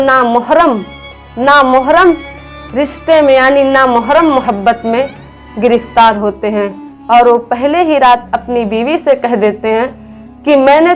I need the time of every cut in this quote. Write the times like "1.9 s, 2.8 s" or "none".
none